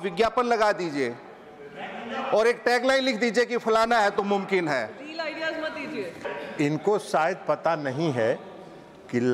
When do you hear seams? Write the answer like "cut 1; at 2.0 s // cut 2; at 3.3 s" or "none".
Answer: cut 1; at 6.3 s